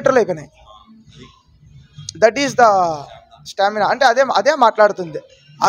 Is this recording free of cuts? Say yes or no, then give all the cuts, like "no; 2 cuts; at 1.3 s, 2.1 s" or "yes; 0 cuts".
yes; 0 cuts